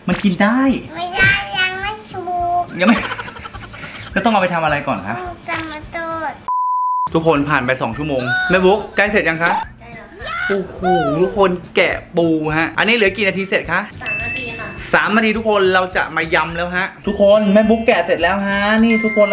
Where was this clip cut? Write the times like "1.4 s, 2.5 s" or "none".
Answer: none